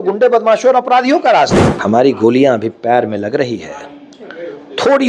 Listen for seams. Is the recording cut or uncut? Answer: cut